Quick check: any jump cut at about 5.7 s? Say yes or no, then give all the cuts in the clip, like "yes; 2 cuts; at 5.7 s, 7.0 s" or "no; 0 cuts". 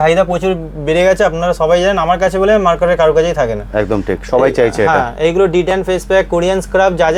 no; 0 cuts